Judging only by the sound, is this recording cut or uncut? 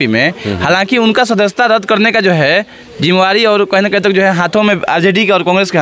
uncut